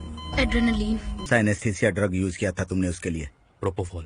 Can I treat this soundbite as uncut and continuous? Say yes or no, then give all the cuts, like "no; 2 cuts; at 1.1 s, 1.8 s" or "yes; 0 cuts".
no; 1 cut; at 1.3 s